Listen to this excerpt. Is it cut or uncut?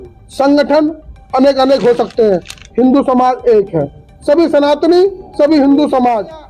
uncut